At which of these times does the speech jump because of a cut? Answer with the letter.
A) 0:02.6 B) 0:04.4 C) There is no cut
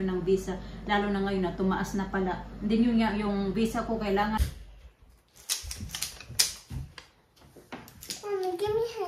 B